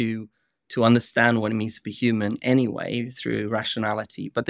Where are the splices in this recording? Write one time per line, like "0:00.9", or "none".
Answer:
none